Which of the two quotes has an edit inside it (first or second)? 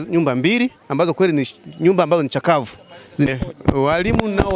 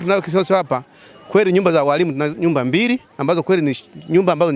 first